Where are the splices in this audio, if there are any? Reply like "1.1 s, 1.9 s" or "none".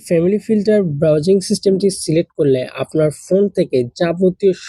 none